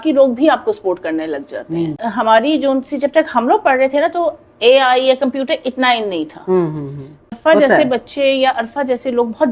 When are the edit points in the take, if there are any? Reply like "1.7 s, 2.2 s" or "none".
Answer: 2.0 s, 7.3 s